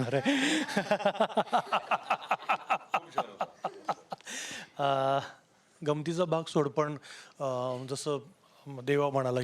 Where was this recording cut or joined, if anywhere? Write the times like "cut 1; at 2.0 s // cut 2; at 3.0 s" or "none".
none